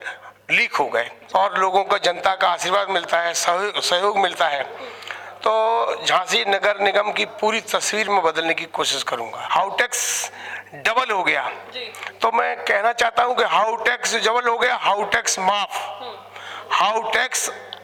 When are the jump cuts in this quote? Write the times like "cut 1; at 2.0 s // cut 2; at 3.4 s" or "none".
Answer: cut 1; at 1.2 s // cut 2; at 9.4 s

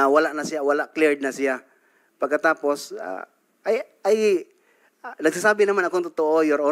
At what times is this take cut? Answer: none

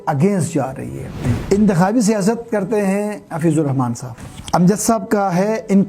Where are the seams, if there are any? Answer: cut 1; at 1.3 s // cut 2; at 4.1 s

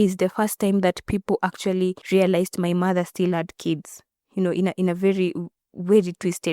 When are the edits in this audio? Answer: cut 1; at 2.0 s

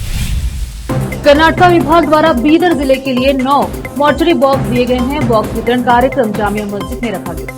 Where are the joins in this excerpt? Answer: cut 1; at 0.9 s

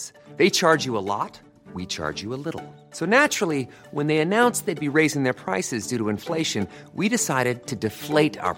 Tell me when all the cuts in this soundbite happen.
none

